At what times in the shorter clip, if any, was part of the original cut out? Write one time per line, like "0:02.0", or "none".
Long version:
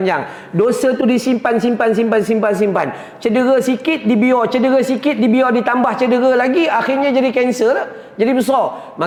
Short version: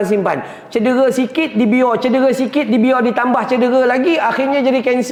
none